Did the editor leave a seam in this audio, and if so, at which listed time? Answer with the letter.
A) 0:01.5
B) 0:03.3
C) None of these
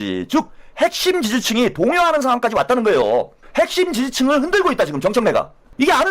B